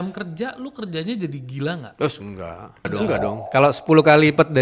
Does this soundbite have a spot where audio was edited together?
yes; 1 cut; at 3.4 s

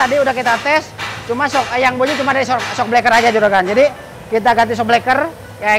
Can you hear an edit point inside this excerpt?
no; 0 cuts

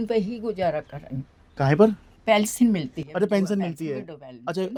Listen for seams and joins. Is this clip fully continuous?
yes; 0 cuts

